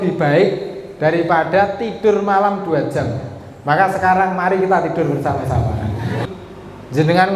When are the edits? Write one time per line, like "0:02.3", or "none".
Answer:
0:06.3